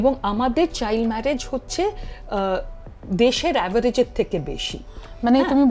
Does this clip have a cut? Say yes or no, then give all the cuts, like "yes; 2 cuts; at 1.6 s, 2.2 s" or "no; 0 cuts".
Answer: no; 0 cuts